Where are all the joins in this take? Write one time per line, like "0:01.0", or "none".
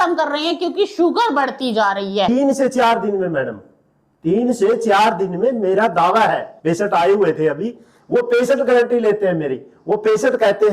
0:02.3
0:06.5